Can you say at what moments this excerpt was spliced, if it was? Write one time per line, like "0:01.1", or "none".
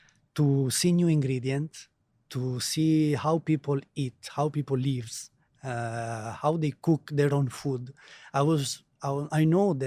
none

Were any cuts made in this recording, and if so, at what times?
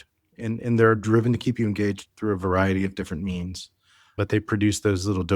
0:04.2

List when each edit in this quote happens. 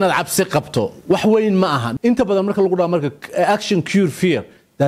0:01.9

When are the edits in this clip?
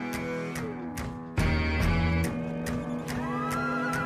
none

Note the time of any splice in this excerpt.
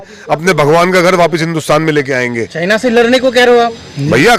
none

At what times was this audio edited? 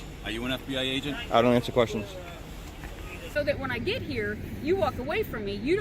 0:03.2

